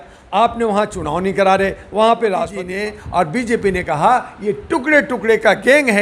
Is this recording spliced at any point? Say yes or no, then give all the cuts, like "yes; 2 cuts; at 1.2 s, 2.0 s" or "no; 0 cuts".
yes; 1 cut; at 2.6 s